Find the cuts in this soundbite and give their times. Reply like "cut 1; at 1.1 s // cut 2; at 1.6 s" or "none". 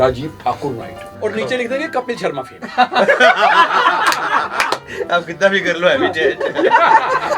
cut 1; at 1.0 s // cut 2; at 4.8 s